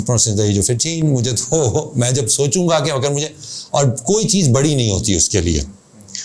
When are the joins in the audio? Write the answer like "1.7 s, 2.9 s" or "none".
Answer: none

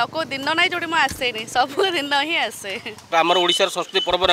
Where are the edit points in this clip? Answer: 3.1 s

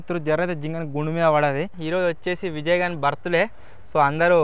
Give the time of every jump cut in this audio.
1.7 s

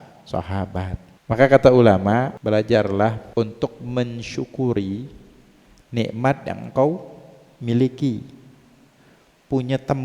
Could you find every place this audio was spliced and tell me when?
1.1 s, 2.3 s, 3.2 s

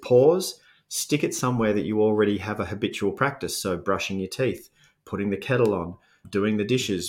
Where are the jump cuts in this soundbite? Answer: 6.2 s

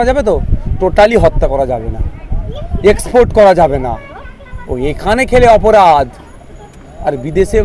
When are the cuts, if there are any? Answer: none

